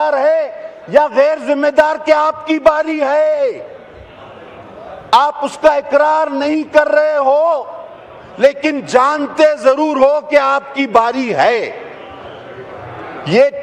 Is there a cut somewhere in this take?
no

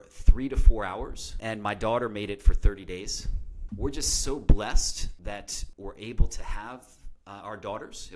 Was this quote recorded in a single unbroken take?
no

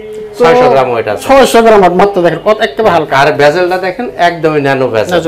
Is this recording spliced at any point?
no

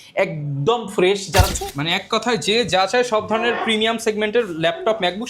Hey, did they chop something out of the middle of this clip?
yes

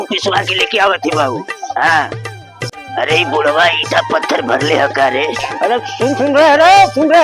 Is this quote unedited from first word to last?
no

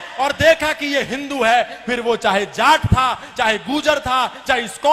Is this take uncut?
yes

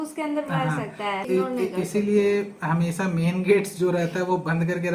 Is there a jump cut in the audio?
yes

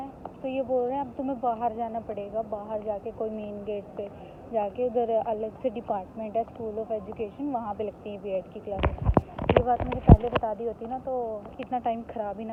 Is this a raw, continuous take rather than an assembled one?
yes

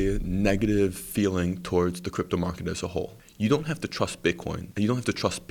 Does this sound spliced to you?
yes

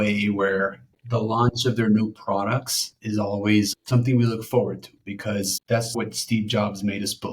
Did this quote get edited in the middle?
yes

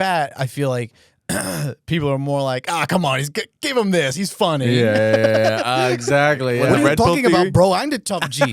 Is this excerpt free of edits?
no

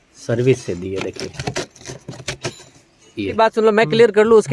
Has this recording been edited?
yes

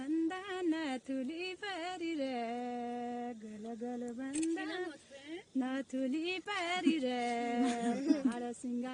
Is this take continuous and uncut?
yes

